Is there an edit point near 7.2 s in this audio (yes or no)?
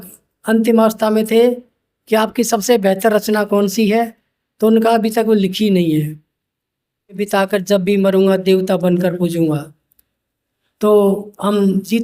yes